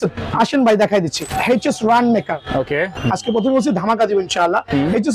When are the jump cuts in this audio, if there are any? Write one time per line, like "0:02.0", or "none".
0:01.3
0:03.0